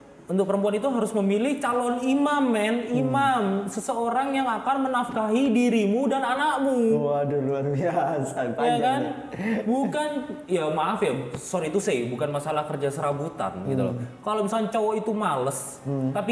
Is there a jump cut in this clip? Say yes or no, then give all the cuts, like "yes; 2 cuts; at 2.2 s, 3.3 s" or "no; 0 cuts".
no; 0 cuts